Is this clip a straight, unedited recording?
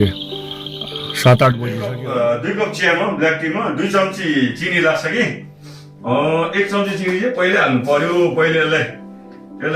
no; 1 cut; at 1.6 s

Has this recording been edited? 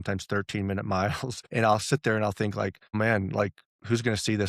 yes; 2 cuts; at 1.3 s, 3.0 s

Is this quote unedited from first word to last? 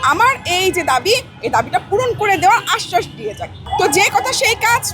no; 1 cut; at 3.6 s

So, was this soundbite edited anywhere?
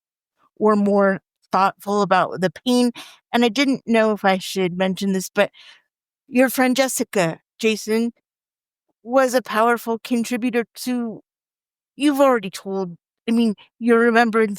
yes; 2 cuts; at 1.2 s, 6.2 s

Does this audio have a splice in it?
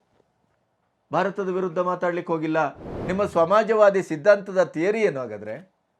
yes; 1 cut; at 2.9 s

